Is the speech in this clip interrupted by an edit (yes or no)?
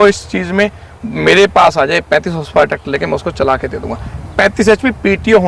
no